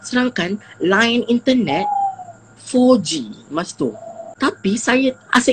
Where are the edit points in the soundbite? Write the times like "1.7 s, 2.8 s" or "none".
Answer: 4.2 s

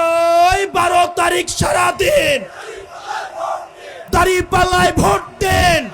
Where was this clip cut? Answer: 3.9 s

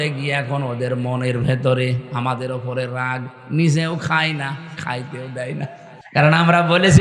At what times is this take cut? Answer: 5.9 s

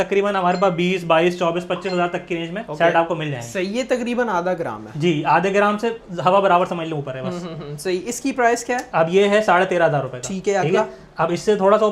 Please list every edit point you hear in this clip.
none

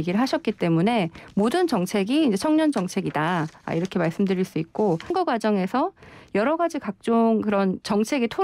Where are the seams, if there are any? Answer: 5.1 s

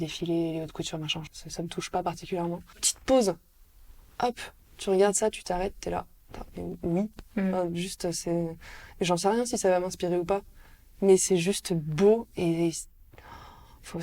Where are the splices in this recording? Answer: 1.4 s, 2.9 s

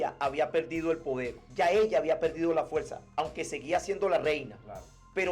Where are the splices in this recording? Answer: 1.4 s

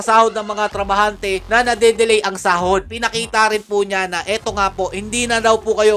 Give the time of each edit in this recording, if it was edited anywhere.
2.9 s

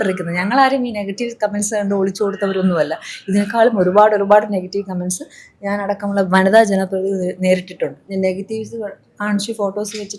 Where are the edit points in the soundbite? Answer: 8.0 s

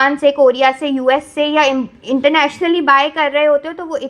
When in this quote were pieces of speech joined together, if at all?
none

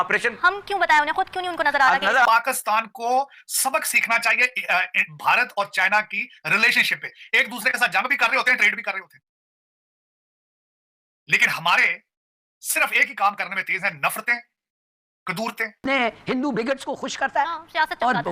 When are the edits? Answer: 2.3 s, 15.8 s

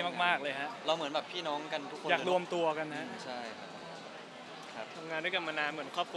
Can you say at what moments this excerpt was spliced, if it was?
none

